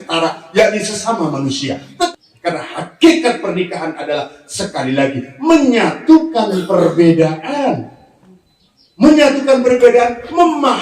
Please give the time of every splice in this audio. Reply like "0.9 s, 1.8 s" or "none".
2.1 s